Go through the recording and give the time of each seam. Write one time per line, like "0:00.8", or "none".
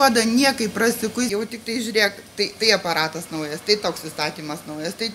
0:01.3